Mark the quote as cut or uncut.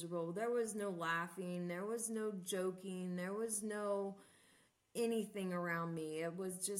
uncut